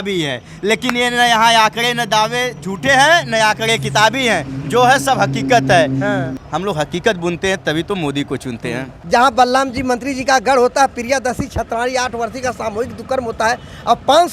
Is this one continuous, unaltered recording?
no; 2 cuts; at 6.4 s, 8.9 s

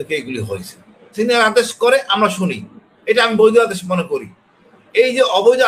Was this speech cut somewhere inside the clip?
yes; 1 cut; at 1.0 s

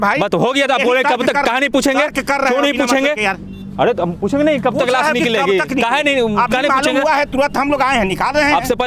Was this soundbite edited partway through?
no; 0 cuts

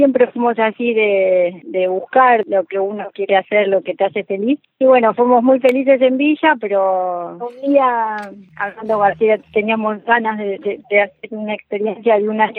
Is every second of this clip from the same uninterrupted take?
yes; 0 cuts

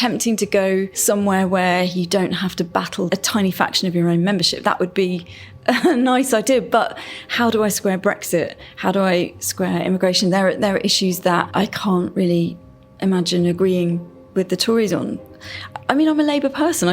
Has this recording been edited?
yes; 4 cuts; at 0.9 s, 3.1 s, 11.4 s, 15.2 s

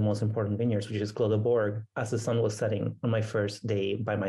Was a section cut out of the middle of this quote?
no; 0 cuts

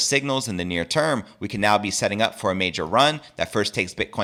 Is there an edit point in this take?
no; 0 cuts

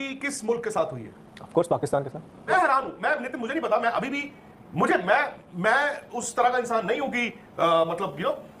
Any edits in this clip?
yes; 1 cut; at 2.5 s

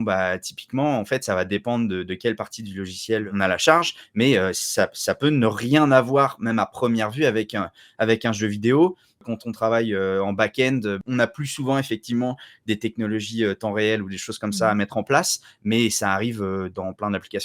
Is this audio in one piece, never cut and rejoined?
no; 3 cuts; at 3.3 s, 9.2 s, 11.0 s

